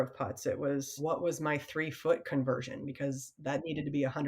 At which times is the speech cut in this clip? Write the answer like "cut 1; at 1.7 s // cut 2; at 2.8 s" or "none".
cut 1; at 1.0 s